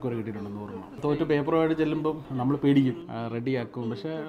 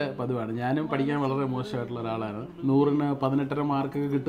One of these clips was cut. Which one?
first; 3 cuts; at 0.9 s, 2.3 s, 3.1 s

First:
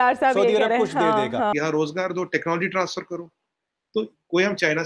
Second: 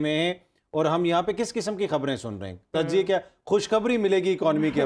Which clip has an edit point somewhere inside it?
first; 1 cut; at 1.5 s

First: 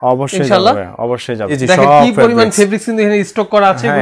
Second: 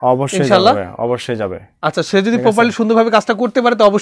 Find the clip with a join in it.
first; 1 cut; at 1.6 s

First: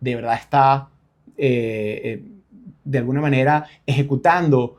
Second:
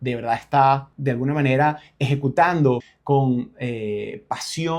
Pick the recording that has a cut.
second; 2 cuts; at 0.9 s, 2.9 s

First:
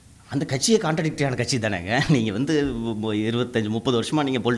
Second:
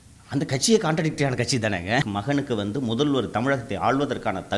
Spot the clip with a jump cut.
second; 1 cut; at 2.0 s

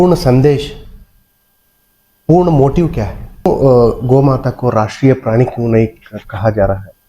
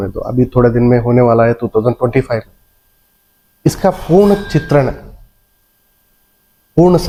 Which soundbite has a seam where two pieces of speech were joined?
first; 1 cut; at 3.2 s

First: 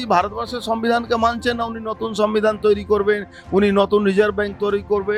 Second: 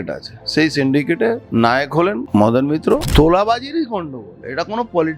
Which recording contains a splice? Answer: second; 3 cuts; at 1.4 s, 2.2 s, 3.1 s

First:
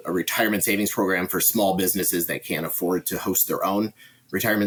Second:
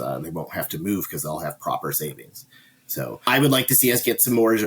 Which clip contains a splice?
second; 1 cut; at 3.3 s

